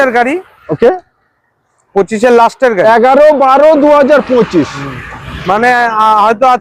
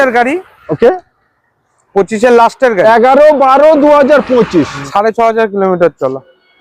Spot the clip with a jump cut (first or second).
second